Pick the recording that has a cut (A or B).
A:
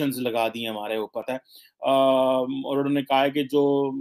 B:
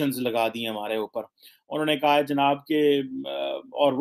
A